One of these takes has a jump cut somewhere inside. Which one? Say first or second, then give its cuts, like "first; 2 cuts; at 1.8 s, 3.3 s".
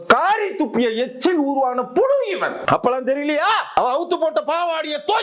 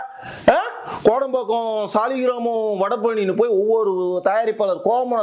first; 2 cuts; at 2.6 s, 3.8 s